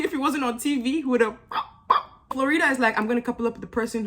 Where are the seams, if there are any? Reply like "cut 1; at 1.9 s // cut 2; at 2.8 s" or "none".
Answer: cut 1; at 2.3 s